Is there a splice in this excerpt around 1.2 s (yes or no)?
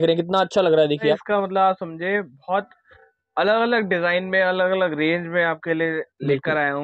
yes